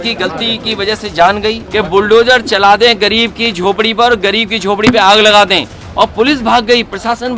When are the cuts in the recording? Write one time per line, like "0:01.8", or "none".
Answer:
0:01.6